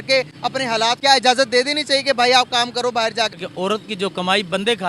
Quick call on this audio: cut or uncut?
cut